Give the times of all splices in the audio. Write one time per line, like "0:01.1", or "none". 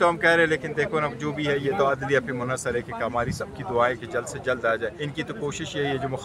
0:05.0